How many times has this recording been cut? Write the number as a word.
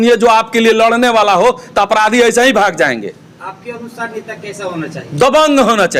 zero